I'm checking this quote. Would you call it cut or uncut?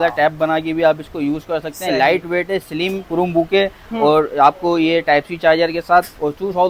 uncut